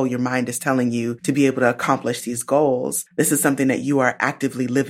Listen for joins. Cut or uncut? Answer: cut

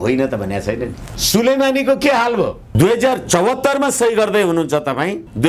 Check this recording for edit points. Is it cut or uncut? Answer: cut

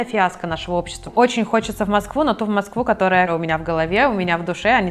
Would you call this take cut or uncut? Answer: cut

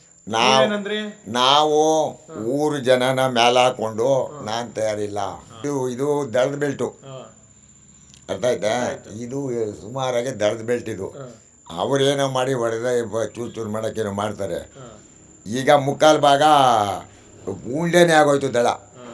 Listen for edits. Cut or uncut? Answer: cut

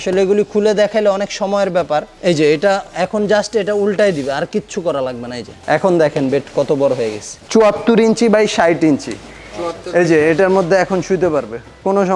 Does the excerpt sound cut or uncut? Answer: uncut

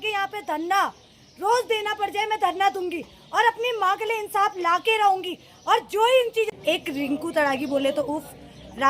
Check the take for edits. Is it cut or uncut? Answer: cut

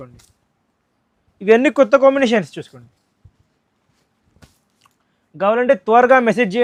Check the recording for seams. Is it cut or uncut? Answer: uncut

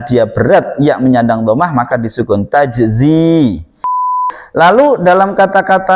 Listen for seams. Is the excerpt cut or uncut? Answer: cut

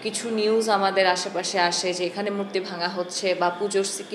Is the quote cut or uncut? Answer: uncut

